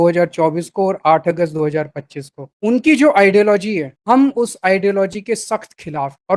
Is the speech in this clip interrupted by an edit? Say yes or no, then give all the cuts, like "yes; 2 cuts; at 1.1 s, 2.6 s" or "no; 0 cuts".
no; 0 cuts